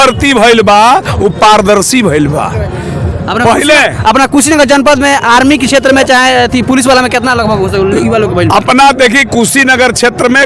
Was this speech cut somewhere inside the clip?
no; 0 cuts

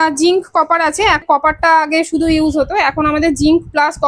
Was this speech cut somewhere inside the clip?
yes; 1 cut; at 1.2 s

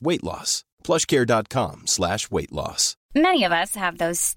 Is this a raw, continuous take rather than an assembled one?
yes; 0 cuts

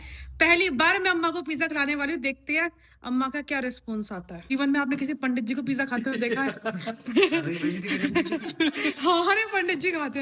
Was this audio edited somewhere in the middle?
yes; 1 cut; at 4.5 s

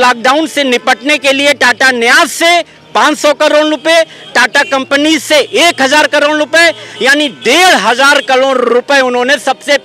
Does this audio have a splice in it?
no; 0 cuts

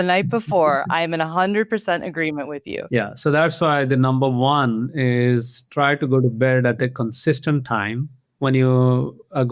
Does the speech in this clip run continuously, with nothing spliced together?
no; 2 cuts; at 2.8 s, 8.1 s

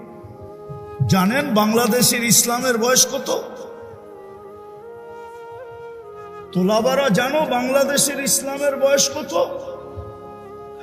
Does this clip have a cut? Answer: no; 0 cuts

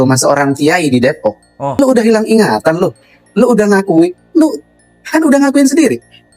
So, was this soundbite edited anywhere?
yes; 1 cut; at 1.8 s

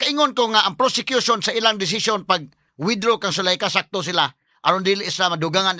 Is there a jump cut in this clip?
no; 0 cuts

